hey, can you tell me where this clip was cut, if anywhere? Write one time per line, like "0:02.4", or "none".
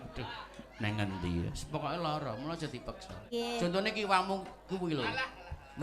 0:03.2